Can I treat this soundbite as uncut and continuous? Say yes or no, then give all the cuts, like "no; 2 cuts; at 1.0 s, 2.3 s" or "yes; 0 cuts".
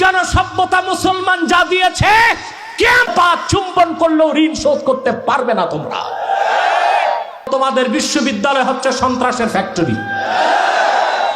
no; 1 cut; at 7.5 s